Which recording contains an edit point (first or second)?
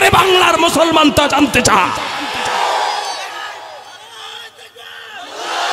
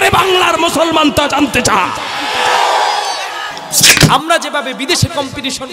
second